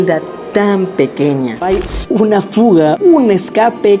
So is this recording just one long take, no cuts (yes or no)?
no